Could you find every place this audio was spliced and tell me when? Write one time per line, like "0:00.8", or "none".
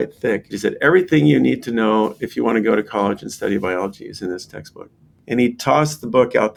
none